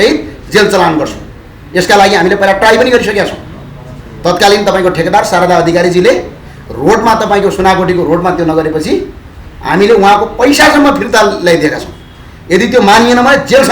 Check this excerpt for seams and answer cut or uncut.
uncut